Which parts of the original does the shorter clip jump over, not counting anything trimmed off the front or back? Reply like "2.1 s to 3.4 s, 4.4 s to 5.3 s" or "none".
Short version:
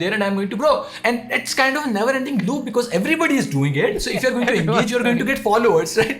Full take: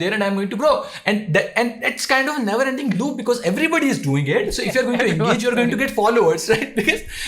1.0 s to 1.5 s

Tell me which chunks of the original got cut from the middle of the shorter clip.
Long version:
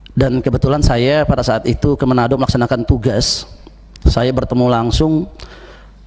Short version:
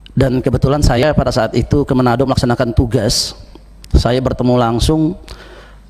1.0 s to 1.1 s

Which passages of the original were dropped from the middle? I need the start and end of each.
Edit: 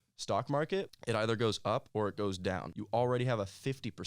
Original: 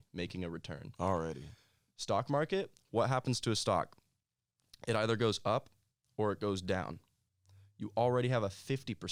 2.7 s to 4.7 s, 5.7 s to 6.1 s, 7.0 s to 7.8 s

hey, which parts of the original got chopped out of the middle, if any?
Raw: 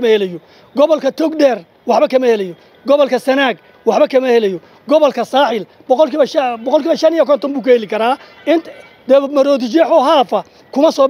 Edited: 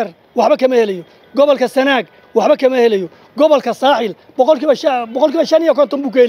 none

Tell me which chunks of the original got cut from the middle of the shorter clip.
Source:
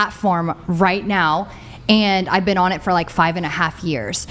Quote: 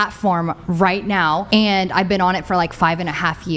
1.4 s to 1.8 s

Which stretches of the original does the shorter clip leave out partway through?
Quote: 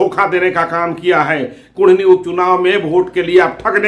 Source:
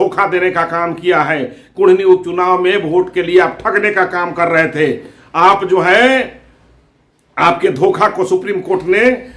none

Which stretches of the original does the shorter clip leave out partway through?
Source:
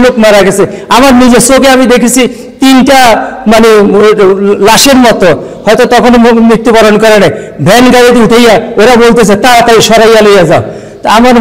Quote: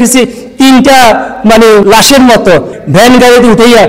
3.8 s to 4.6 s, 5.5 s to 7.5 s

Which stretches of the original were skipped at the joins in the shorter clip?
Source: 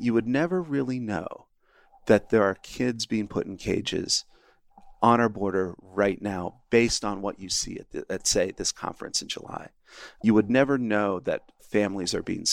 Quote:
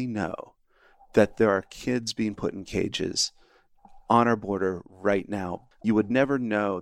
6.5 s to 10.0 s

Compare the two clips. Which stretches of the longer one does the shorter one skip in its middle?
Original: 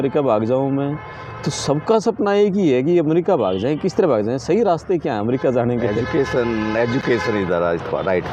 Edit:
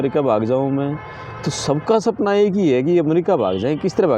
none

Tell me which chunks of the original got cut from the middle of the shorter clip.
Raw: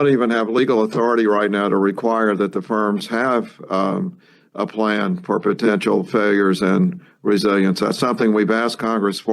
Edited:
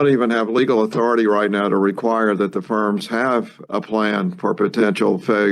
3.6 s to 4.4 s

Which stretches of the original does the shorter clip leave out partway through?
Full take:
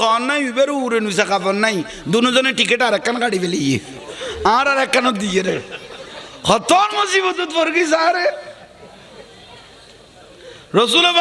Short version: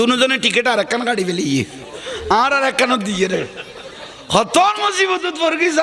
none

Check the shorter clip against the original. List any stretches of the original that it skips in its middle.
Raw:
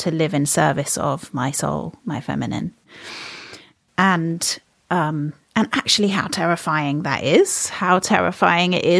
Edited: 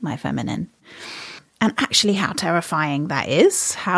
3.5 s to 5.4 s

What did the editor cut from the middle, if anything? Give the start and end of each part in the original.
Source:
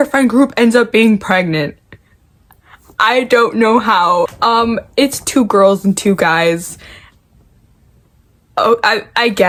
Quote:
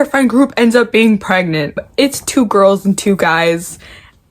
1.8 s to 4.8 s

